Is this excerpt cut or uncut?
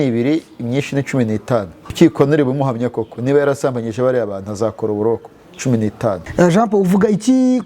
cut